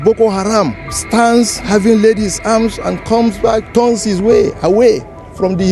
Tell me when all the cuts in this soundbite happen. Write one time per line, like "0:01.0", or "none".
0:01.6